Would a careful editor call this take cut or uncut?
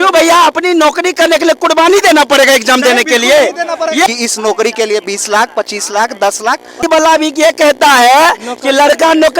cut